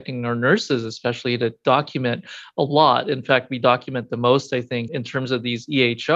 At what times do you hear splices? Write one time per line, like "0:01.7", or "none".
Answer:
0:04.9

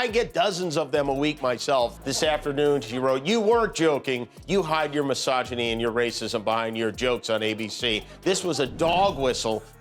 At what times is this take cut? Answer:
0:02.0

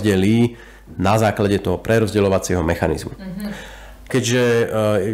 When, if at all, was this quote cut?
0:04.1

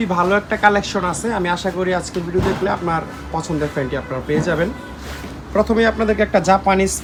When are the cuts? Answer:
none

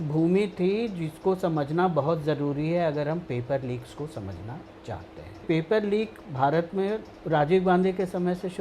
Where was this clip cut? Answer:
0:05.4
0:07.1

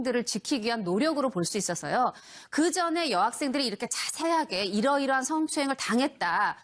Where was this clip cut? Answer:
none

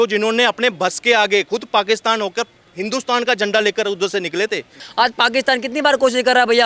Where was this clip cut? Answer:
0:04.8

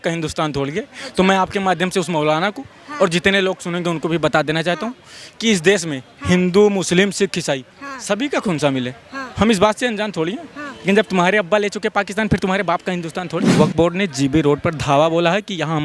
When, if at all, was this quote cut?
0:13.5

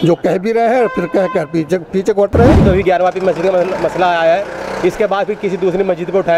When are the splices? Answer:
0:02.6

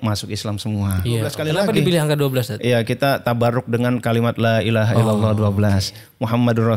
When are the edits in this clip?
0:01.4

